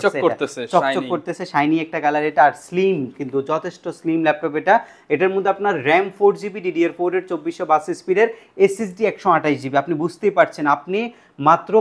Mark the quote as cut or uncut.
uncut